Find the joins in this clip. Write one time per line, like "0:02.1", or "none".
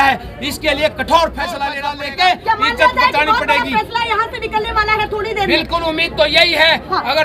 0:01.8

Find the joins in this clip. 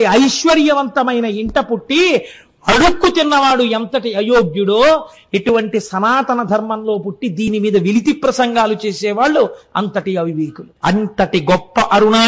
0:10.6

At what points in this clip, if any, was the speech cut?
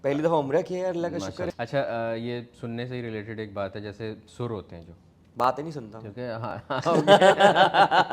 0:01.5

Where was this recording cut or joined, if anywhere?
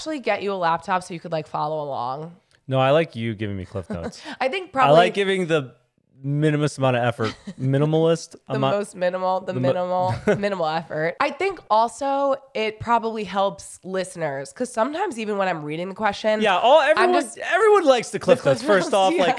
0:11.1
0:17.4

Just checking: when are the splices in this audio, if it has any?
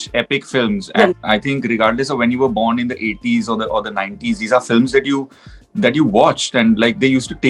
none

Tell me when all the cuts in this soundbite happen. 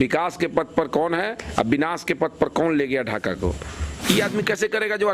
0:03.9

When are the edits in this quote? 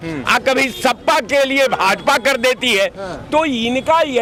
none

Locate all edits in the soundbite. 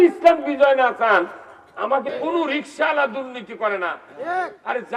0:02.1

